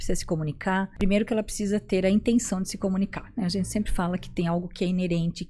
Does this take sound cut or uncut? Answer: cut